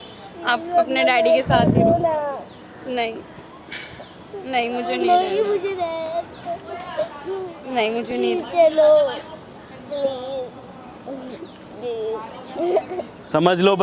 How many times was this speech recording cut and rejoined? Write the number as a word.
zero